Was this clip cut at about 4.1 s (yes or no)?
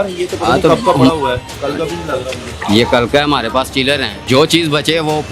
yes